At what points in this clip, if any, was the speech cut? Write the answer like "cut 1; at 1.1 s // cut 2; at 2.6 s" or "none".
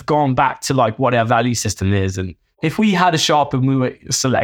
cut 1; at 2.6 s